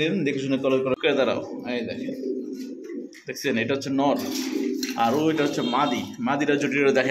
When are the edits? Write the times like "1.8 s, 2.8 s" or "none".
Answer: 1.0 s